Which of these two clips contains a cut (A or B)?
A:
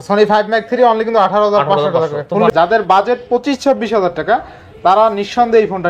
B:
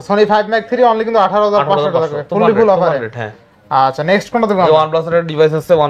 A